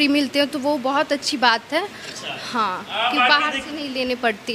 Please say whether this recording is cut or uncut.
uncut